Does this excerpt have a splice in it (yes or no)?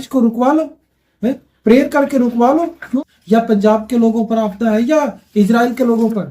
yes